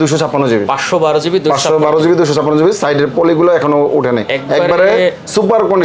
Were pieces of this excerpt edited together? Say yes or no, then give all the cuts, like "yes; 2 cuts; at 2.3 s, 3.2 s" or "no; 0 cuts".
no; 0 cuts